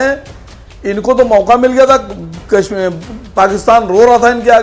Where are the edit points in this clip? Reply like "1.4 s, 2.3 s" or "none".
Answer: none